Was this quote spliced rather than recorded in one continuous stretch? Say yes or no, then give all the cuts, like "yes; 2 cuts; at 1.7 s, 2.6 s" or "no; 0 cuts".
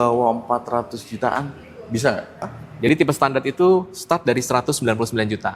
yes; 1 cut; at 2.6 s